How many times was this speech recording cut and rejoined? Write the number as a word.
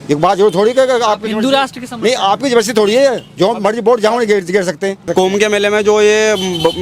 one